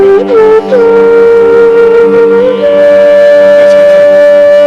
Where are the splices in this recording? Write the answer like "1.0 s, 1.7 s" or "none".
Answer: none